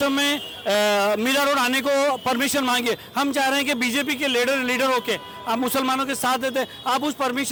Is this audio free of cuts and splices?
yes; 0 cuts

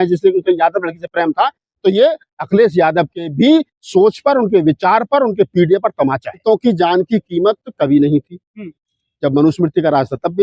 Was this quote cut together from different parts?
yes; 1 cut; at 6.4 s

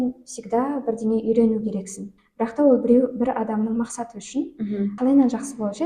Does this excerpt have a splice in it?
yes; 2 cuts; at 2.1 s, 4.9 s

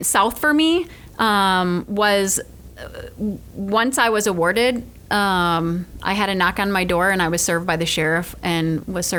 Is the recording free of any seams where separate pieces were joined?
yes; 0 cuts

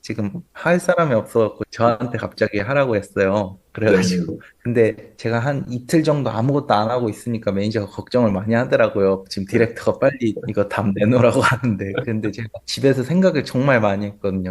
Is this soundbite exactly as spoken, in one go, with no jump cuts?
no; 1 cut; at 1.6 s

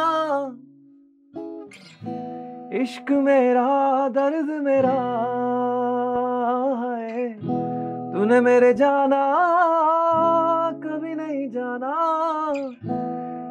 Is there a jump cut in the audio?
no; 0 cuts

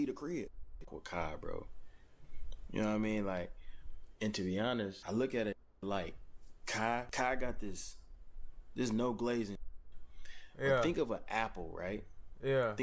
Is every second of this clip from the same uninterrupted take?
no; 2 cuts; at 5.0 s, 7.1 s

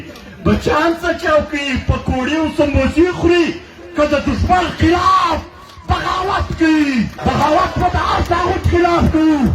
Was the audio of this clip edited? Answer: yes; 1 cut; at 7.1 s

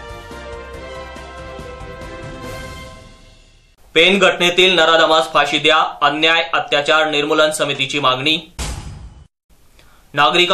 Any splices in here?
yes; 1 cut; at 3.5 s

